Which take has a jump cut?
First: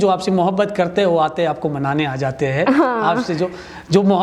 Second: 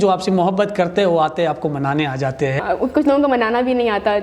second; 1 cut; at 2.6 s

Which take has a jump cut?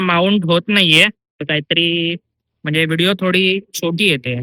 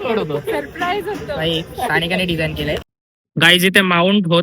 second; 1 cut; at 2.9 s

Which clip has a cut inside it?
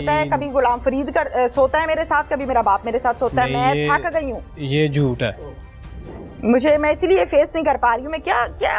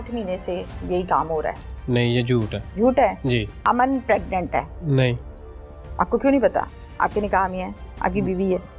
second; 3 cuts; at 2.6 s, 3.5 s, 4.8 s

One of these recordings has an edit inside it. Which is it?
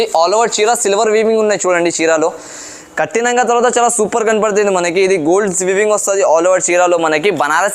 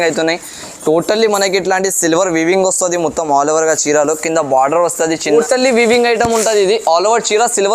second; 1 cut; at 5.3 s

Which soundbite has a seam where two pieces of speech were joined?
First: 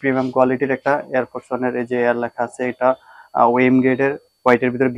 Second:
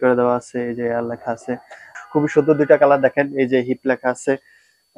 second; 1 cut; at 1.9 s

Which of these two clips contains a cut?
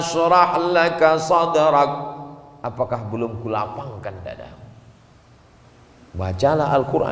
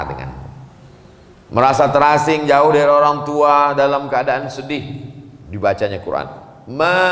first; 1 cut; at 5.6 s

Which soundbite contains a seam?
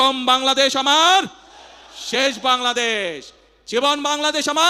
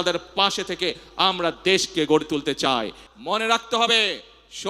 second; 1 cut; at 3.0 s

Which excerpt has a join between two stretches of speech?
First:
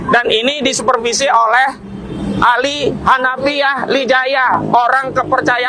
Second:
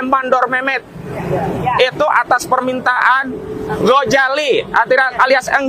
first; 1 cut; at 4.6 s

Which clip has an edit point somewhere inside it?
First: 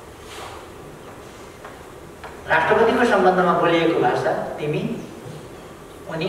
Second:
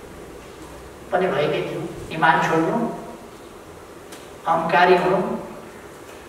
second; 1 cut; at 2.0 s

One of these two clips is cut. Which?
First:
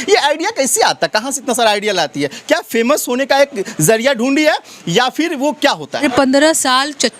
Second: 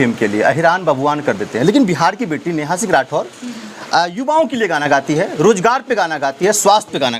first; 1 cut; at 6.0 s

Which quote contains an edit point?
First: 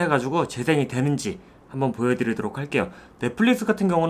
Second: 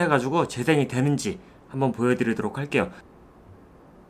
second; 1 cut; at 3.0 s

